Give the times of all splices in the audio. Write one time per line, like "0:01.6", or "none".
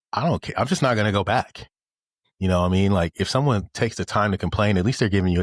none